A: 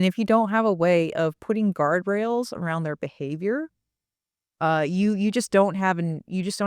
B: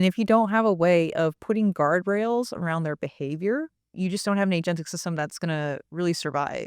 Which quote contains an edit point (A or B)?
B